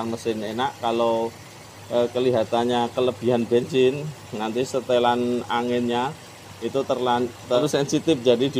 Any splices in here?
yes; 1 cut; at 7.6 s

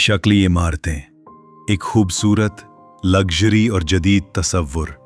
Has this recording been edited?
no; 0 cuts

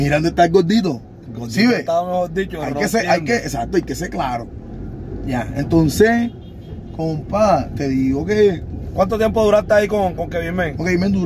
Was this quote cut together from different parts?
no; 0 cuts

